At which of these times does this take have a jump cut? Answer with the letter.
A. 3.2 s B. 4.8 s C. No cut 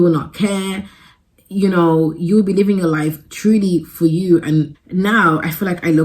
B